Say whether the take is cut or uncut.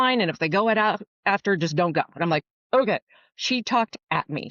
cut